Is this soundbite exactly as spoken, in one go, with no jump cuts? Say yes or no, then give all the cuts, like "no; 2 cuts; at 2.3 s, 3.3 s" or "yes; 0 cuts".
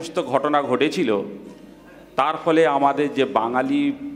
yes; 0 cuts